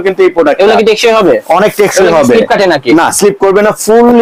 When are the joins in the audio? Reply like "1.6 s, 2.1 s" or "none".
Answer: none

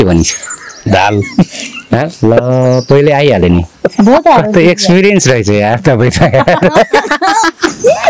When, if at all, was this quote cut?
none

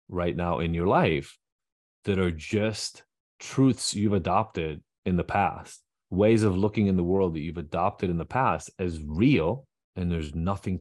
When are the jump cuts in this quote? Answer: 9.8 s

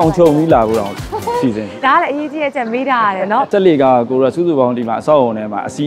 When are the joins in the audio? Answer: 3.5 s

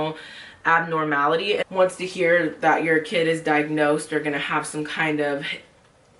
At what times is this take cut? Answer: 1.6 s

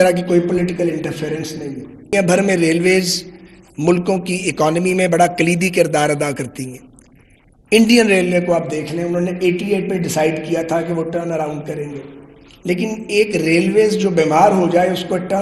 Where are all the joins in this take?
2.1 s

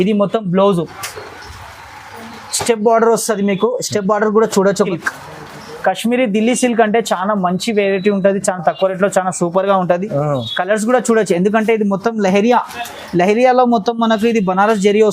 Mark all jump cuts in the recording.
4.9 s

